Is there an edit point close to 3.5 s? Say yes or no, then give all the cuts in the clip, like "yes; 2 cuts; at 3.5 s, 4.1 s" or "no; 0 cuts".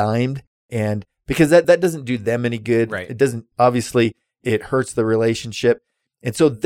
no; 0 cuts